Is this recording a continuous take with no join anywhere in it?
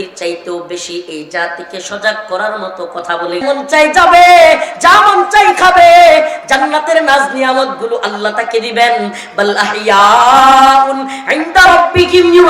no; 1 cut; at 3.4 s

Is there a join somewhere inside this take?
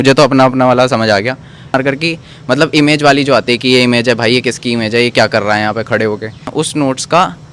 yes; 2 cuts; at 1.7 s, 6.5 s

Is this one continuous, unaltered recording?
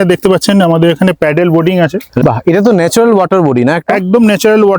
no; 1 cut; at 2.1 s

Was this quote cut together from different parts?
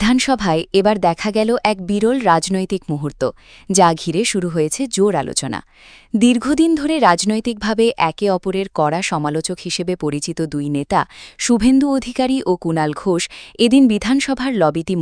no; 0 cuts

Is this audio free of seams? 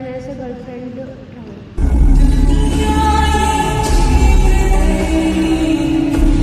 yes; 0 cuts

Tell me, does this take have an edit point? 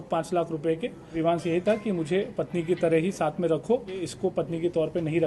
yes; 2 cuts; at 1.1 s, 4.1 s

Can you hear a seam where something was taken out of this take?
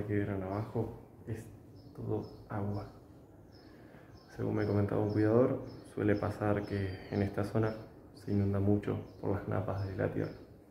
no; 0 cuts

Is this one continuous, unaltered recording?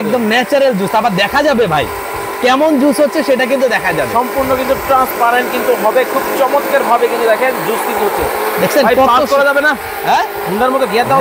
yes; 0 cuts

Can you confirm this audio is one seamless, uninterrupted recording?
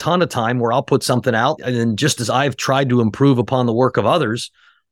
no; 1 cut; at 1.6 s

